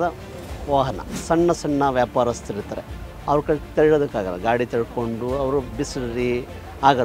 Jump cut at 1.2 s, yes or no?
yes